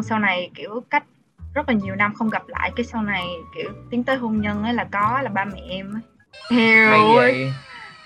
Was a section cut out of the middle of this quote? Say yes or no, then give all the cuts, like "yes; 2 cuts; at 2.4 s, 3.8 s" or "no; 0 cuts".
no; 0 cuts